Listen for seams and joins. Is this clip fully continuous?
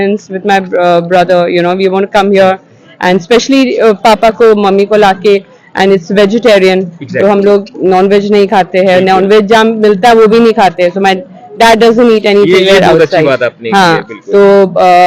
yes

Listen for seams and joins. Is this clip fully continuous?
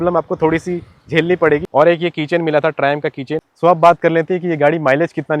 no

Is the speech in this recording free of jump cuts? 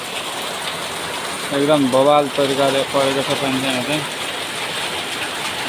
yes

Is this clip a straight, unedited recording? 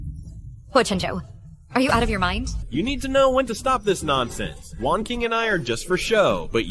no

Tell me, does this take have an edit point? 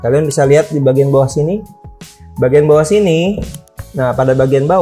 no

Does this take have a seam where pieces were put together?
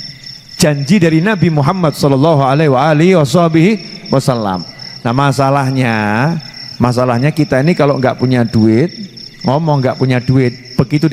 no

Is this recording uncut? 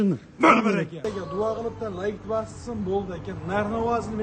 no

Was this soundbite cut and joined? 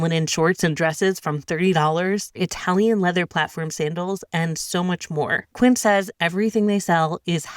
yes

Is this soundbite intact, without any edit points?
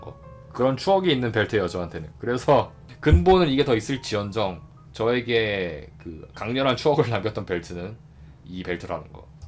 yes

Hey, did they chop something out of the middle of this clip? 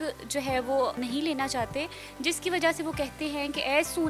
no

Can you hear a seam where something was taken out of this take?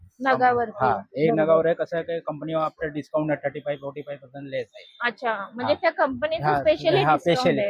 no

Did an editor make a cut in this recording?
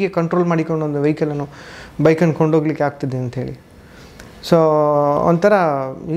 no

